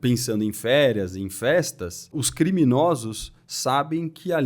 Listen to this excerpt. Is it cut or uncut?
cut